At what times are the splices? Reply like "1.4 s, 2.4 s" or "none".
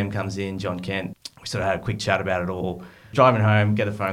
1.1 s, 3.1 s

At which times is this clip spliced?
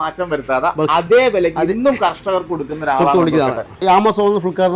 3.8 s

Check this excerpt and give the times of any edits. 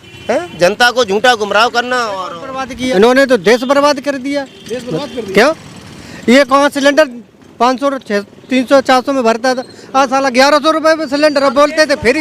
2.9 s

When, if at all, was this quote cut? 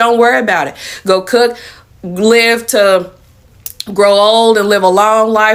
none

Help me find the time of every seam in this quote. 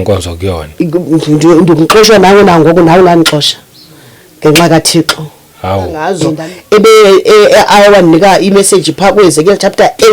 6.2 s

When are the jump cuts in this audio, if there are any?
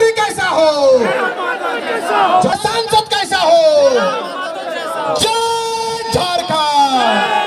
2.6 s

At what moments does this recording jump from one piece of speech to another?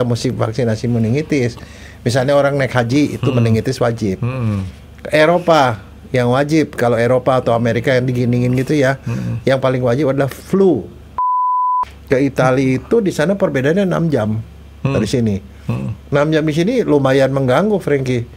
11.4 s

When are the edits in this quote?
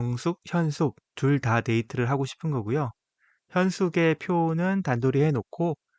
1.1 s

